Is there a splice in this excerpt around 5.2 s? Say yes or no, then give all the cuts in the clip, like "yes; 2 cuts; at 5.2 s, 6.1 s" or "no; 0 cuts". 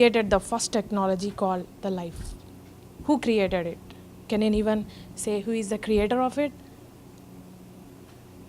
no; 1 cut; at 1.4 s